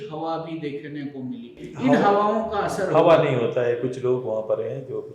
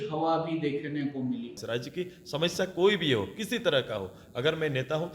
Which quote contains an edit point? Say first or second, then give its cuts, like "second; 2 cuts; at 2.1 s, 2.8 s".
second; 1 cut; at 1.6 s